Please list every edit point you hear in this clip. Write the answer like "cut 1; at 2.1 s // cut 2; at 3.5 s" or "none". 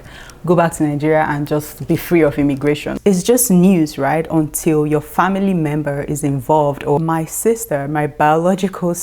cut 1; at 2.9 s // cut 2; at 7.0 s